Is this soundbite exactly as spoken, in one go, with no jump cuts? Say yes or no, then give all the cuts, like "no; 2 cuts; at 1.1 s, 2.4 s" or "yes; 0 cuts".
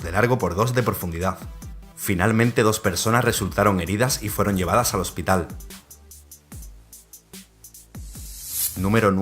no; 1 cut; at 4.0 s